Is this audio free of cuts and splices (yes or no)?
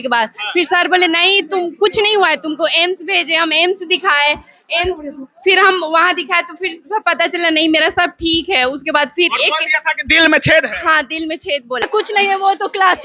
no